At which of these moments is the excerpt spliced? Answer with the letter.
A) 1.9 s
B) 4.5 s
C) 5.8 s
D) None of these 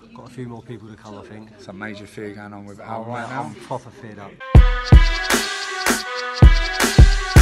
B